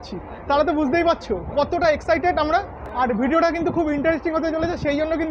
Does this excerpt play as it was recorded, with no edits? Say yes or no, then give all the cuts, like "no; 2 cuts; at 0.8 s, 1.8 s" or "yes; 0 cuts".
yes; 0 cuts